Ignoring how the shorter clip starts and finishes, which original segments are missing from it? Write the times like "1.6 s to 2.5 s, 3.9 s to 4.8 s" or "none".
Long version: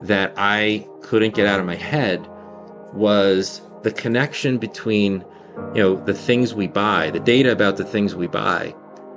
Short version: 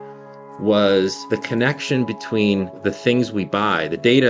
3.5 s to 3.7 s, 5.3 s to 6.0 s